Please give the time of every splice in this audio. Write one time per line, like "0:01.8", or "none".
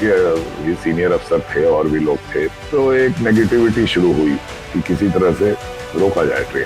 0:02.6
0:05.8